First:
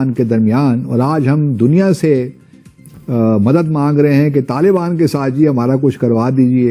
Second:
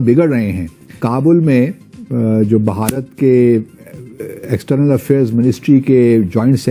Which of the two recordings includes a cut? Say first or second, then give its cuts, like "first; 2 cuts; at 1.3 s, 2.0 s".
second; 1 cut; at 1.0 s